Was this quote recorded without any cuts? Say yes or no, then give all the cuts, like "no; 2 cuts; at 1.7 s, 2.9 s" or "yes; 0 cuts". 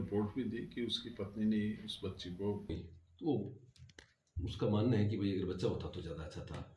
no; 1 cut; at 2.7 s